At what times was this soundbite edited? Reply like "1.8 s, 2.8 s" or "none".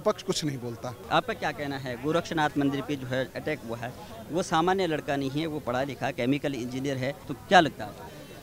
none